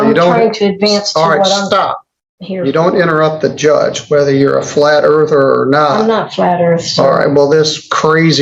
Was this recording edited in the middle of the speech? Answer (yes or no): no